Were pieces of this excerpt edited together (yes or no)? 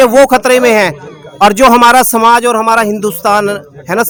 no